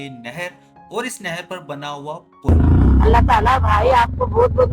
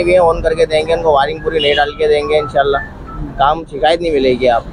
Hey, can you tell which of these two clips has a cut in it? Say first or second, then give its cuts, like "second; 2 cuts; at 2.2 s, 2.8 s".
first; 1 cut; at 2.5 s